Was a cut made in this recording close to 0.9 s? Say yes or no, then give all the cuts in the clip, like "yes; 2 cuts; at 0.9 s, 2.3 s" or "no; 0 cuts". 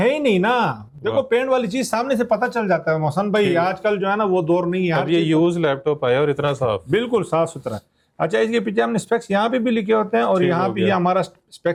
no; 0 cuts